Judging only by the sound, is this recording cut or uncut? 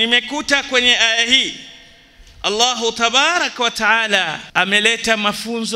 cut